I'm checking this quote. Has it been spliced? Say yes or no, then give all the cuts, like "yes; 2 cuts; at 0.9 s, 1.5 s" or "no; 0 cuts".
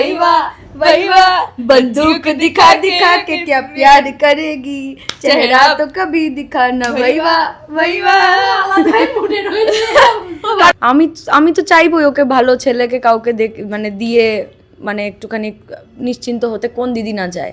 yes; 1 cut; at 10.7 s